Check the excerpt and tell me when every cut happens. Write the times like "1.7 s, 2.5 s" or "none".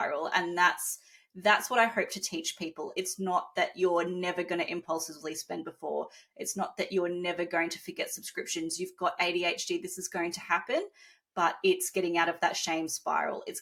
none